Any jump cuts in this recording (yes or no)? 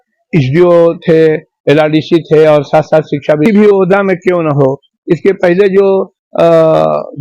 yes